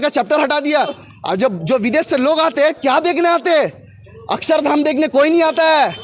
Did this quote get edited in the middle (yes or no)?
yes